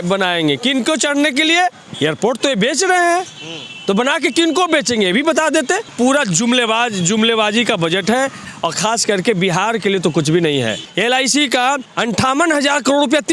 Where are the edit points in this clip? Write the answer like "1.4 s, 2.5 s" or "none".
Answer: 1.8 s, 5.9 s, 8.5 s, 10.9 s, 11.9 s